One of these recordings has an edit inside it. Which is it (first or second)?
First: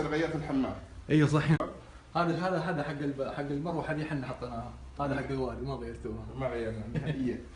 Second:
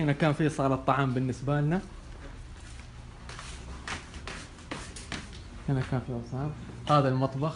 first